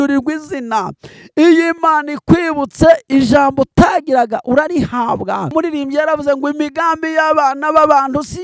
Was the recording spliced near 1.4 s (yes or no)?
no